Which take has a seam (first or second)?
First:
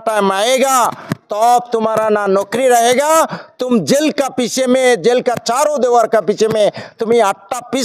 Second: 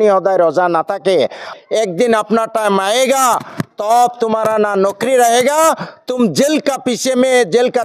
second